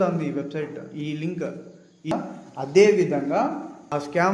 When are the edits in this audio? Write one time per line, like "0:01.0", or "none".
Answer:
0:02.1